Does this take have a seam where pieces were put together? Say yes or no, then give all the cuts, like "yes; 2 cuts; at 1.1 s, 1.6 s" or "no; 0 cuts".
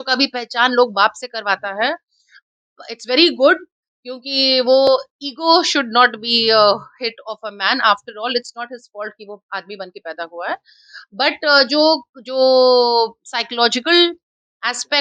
no; 0 cuts